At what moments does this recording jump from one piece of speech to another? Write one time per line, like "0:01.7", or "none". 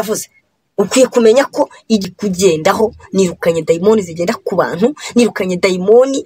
0:02.1